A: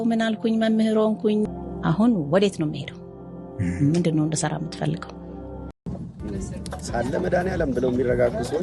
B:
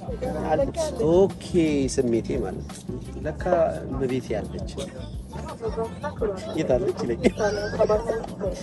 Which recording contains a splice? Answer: A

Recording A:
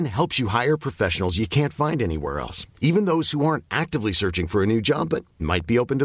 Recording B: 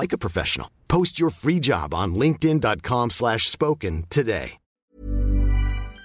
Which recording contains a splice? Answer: B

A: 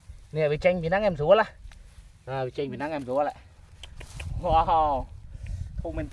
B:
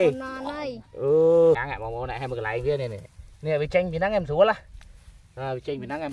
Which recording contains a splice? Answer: B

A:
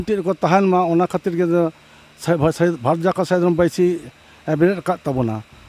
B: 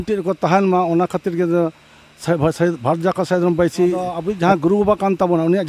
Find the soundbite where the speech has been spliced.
B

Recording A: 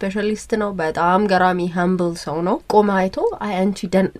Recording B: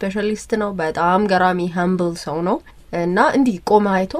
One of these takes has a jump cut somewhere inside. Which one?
A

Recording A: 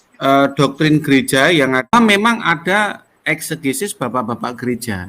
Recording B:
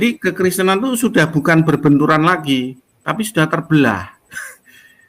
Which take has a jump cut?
A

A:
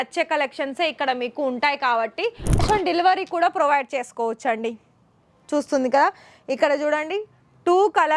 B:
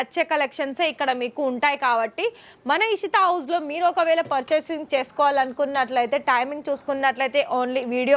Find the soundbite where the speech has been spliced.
A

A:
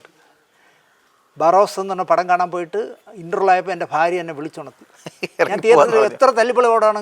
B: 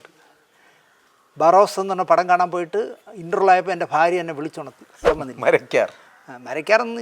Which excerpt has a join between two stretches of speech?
B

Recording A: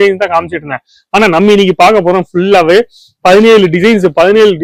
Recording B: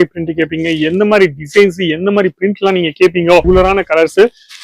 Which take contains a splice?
B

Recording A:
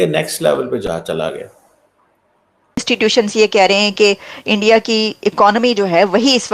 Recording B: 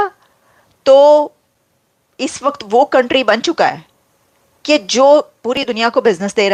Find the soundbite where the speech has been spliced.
A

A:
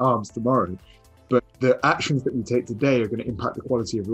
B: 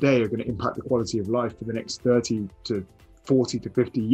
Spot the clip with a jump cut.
A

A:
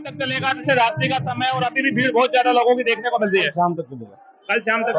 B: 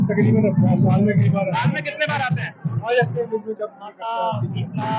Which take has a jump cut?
B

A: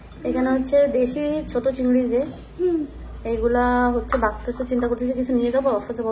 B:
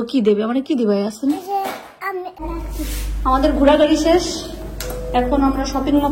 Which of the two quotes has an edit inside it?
B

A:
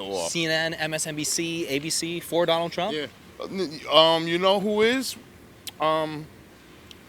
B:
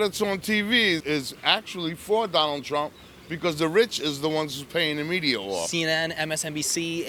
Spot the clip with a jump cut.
B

